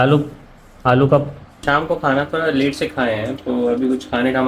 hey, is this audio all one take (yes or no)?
no